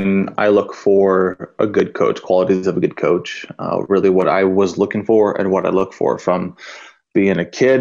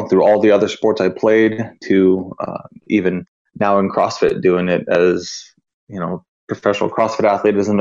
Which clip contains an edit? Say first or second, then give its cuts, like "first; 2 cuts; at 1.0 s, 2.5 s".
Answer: second; 1 cut; at 3.4 s